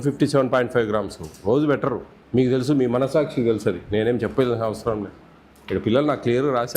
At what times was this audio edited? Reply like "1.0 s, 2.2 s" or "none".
2.1 s